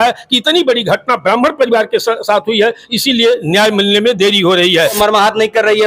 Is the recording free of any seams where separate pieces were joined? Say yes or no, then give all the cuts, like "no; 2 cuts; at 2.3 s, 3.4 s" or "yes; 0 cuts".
no; 1 cut; at 4.9 s